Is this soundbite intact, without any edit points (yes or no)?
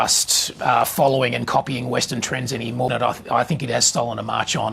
no